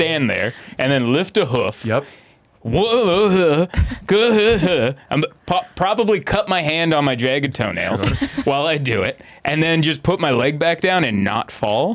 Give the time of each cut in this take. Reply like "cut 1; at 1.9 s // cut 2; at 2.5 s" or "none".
none